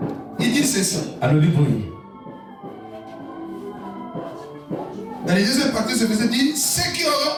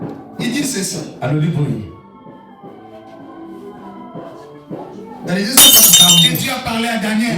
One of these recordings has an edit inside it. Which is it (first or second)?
second